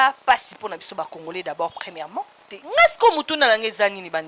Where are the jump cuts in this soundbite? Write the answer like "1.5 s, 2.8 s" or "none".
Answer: 2.5 s